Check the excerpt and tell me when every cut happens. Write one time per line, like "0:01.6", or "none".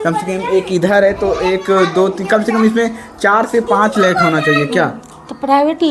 none